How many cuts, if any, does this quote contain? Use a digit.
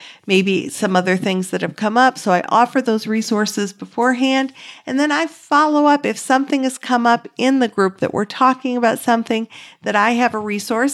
0